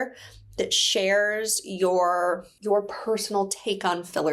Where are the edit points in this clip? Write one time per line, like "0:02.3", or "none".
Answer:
0:02.5